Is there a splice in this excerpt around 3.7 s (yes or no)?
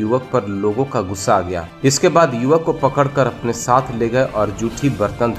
no